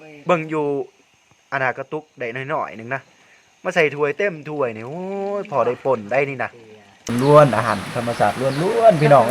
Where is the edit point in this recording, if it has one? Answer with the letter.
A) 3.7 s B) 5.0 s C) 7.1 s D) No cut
C